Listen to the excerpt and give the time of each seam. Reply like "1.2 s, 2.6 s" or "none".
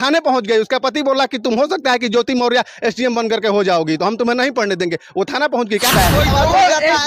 5.9 s